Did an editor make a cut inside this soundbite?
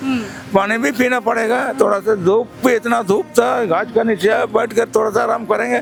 no; 0 cuts

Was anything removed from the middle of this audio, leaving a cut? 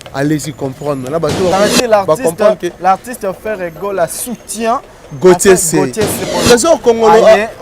yes; 2 cuts; at 1.5 s, 6.2 s

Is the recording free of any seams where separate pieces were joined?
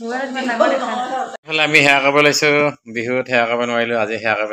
no; 1 cut; at 1.4 s

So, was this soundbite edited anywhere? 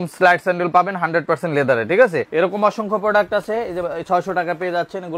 yes; 1 cut; at 2.3 s

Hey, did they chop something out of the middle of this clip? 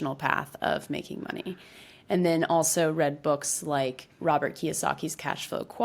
no; 0 cuts

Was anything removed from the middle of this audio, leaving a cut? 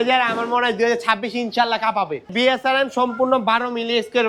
yes; 1 cut; at 2.3 s

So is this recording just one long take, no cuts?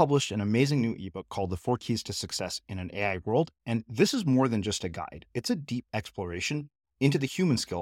yes; 0 cuts

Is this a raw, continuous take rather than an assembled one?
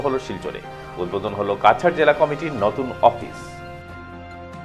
yes; 0 cuts

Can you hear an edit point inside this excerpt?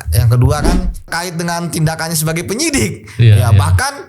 yes; 1 cut; at 1.0 s

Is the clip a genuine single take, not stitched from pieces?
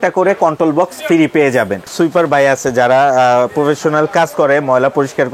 no; 1 cut; at 1.9 s

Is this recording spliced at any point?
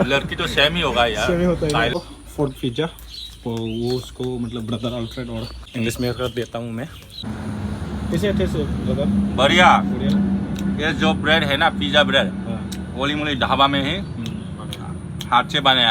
yes; 3 cuts; at 1.9 s, 5.6 s, 7.3 s

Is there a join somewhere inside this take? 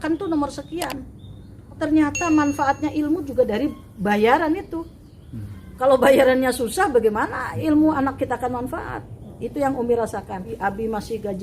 yes; 2 cuts; at 1.7 s, 10.5 s

